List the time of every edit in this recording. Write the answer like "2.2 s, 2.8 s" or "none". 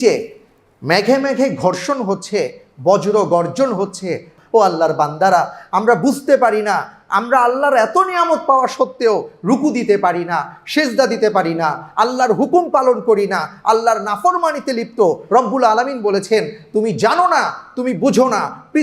4.3 s